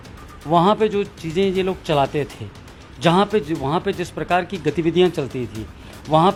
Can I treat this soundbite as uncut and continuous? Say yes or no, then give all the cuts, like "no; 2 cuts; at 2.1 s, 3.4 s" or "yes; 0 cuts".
yes; 0 cuts